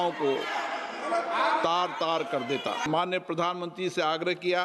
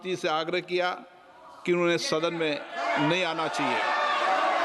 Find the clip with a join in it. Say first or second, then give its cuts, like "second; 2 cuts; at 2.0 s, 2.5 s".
first; 1 cut; at 2.8 s